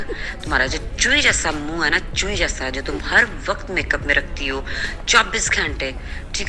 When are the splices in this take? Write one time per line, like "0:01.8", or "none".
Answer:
none